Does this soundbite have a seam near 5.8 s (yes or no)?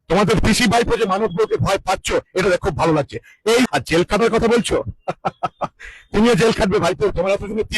no